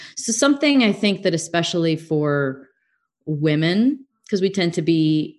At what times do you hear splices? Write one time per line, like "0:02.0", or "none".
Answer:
0:04.1